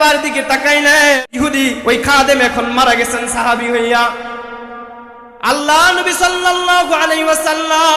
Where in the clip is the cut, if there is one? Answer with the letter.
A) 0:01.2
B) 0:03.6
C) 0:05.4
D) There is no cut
A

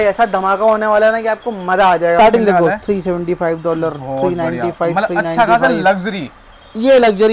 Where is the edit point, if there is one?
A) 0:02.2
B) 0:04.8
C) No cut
A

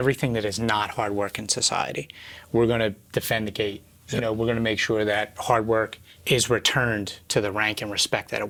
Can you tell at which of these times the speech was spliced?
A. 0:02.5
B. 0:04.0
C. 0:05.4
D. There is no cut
D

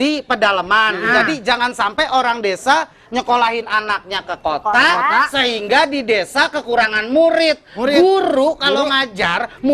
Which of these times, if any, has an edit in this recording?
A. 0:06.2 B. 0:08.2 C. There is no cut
C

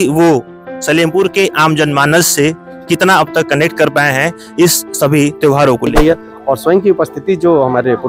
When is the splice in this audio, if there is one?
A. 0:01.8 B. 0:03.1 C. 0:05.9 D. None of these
C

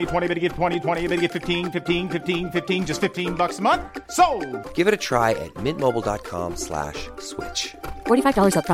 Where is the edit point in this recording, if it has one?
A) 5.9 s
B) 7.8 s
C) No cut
C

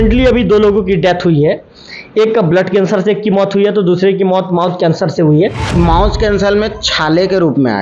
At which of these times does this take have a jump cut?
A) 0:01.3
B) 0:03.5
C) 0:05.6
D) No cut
C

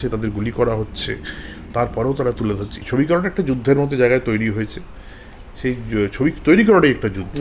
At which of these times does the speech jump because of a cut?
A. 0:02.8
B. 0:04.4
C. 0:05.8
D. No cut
A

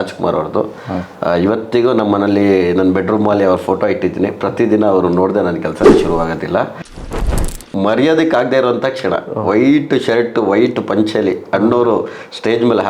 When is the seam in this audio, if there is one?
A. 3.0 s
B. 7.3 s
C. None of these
B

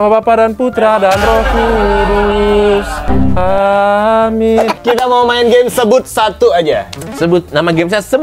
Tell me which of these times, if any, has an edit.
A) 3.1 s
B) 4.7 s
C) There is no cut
B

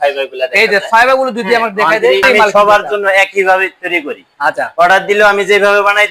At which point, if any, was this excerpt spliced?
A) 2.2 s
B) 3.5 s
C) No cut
A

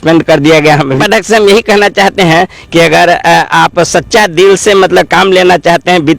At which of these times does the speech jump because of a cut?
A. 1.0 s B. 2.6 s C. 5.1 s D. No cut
A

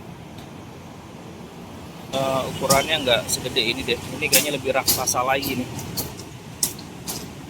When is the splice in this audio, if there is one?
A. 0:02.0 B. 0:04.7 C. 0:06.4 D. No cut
A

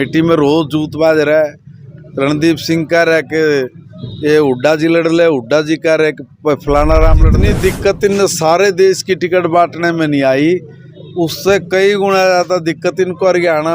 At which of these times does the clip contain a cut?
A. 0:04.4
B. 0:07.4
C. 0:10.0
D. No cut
B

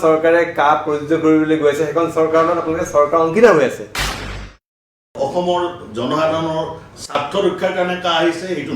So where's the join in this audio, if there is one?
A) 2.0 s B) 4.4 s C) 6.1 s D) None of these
B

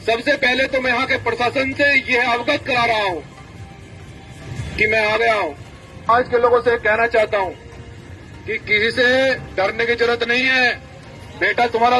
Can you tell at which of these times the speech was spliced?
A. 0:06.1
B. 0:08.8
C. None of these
A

